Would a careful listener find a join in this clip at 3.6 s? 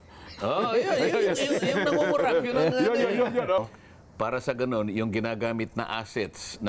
yes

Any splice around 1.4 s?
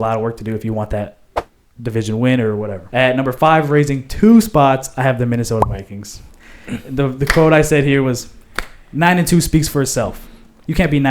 no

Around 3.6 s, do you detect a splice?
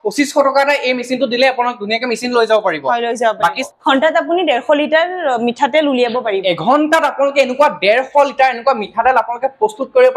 yes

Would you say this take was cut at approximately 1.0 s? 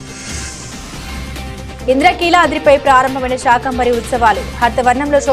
yes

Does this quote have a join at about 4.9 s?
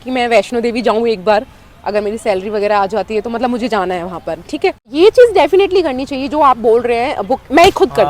yes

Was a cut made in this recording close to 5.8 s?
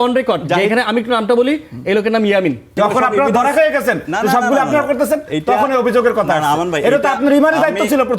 no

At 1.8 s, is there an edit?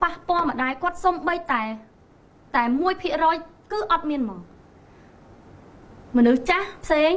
no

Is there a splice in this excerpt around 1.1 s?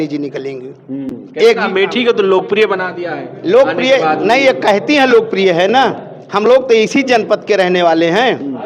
no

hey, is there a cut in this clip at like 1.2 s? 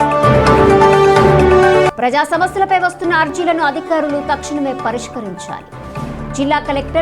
yes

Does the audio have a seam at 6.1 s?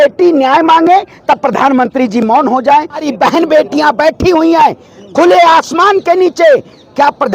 no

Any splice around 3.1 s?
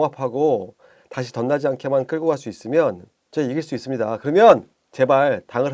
yes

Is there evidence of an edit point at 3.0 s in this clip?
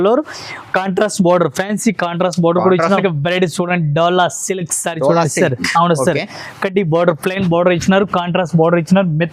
yes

